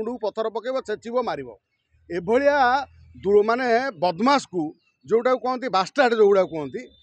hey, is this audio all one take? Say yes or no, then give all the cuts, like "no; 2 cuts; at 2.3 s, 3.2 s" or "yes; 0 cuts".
yes; 0 cuts